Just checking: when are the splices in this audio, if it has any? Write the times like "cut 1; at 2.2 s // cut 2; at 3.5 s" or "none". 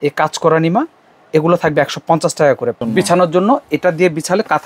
cut 1; at 2.8 s